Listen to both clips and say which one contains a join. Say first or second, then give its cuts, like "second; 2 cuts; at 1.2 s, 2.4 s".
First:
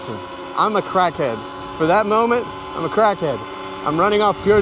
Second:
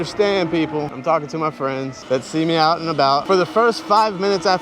second; 3 cuts; at 0.9 s, 2.0 s, 3.2 s